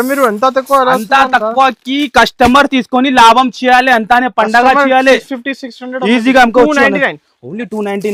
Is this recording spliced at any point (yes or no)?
no